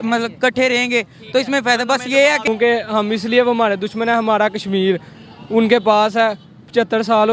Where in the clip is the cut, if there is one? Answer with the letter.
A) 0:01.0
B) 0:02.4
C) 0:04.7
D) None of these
B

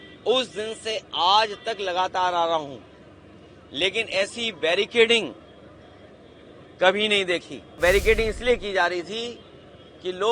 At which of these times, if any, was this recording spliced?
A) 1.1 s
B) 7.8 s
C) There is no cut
B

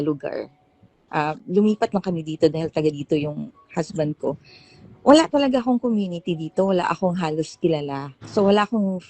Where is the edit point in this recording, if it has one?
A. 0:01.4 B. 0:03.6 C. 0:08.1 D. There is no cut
C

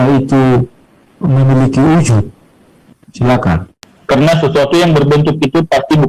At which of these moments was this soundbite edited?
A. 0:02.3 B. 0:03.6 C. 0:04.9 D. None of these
B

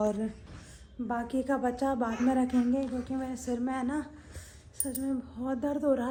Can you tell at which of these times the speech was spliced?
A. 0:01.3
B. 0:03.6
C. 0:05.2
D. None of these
D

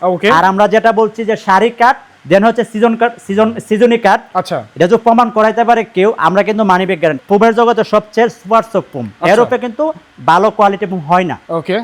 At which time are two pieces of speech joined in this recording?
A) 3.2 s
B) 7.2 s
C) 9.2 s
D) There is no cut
B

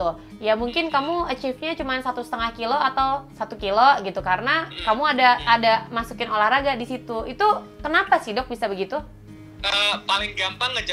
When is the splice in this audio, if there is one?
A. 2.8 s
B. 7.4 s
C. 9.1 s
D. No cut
D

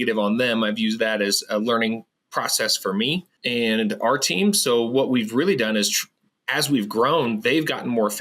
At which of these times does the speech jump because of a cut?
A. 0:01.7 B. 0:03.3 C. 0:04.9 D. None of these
B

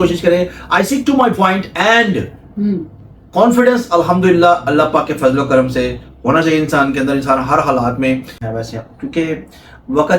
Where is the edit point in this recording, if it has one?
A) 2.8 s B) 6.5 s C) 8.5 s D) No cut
C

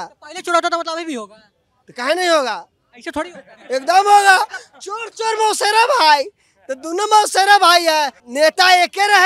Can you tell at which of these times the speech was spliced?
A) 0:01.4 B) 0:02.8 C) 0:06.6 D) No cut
D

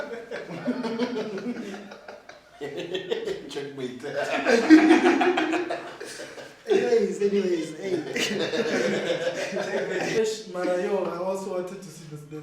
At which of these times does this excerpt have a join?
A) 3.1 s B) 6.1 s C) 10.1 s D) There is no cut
C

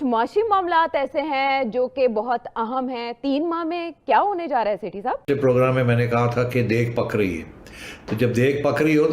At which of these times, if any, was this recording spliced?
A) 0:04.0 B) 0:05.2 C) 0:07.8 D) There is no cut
B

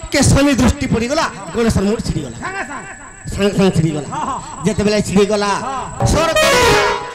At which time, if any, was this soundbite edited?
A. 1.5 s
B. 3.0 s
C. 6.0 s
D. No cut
C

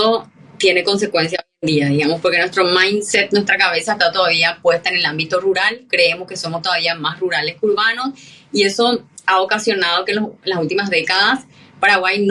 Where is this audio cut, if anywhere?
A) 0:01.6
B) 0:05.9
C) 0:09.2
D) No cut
D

